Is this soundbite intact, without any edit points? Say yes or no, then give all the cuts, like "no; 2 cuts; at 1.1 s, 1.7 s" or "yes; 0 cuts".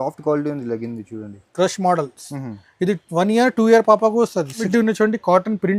no; 1 cut; at 4.6 s